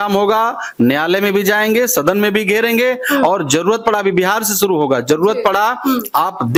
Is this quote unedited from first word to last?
yes; 0 cuts

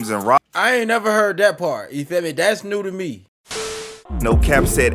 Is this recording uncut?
no; 1 cut; at 3.8 s

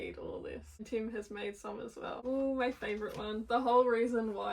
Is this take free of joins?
no; 2 cuts; at 0.9 s, 2.2 s

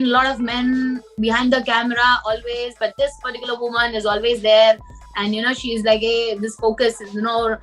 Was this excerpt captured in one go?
yes; 0 cuts

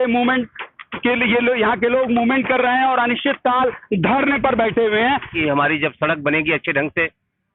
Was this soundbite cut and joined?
yes; 1 cut; at 5.3 s

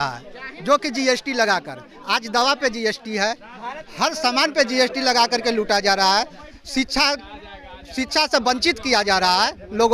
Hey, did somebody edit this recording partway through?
no; 0 cuts

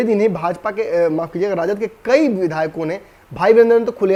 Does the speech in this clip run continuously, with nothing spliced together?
yes; 0 cuts

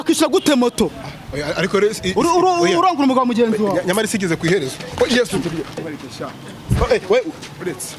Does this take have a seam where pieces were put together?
yes; 1 cut; at 5.8 s

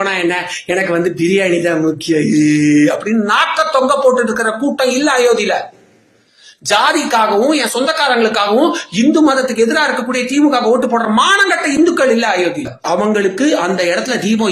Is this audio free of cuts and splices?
no; 1 cut; at 12.7 s

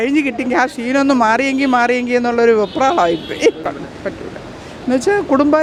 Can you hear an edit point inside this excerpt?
no; 0 cuts

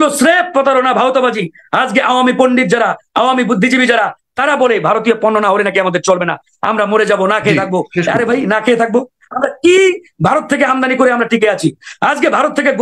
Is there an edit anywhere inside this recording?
no; 0 cuts

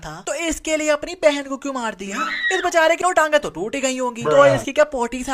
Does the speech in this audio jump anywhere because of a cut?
yes; 1 cut; at 3.0 s

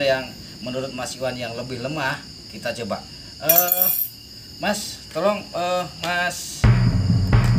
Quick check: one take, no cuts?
no; 1 cut; at 6.6 s

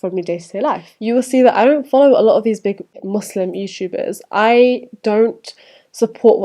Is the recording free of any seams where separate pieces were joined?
no; 2 cuts; at 0.9 s, 3.0 s

